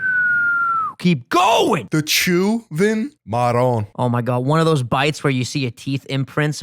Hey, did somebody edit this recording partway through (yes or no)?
yes